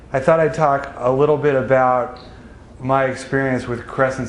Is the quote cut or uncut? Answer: cut